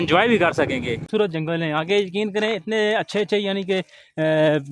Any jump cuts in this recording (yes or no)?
yes